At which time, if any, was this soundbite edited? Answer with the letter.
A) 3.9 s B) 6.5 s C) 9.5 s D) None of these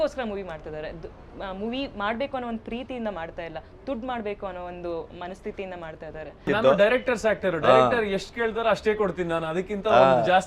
B